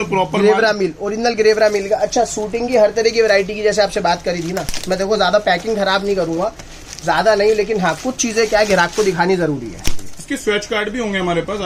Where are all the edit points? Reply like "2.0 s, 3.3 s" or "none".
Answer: none